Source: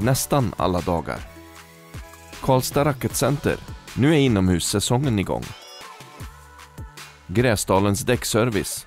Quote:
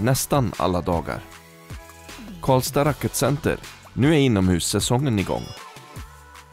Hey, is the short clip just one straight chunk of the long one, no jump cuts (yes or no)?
no